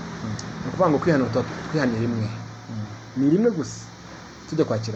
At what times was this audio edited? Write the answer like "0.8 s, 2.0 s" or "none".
none